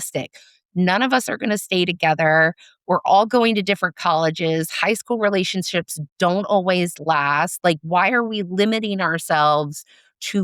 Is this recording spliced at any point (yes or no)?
no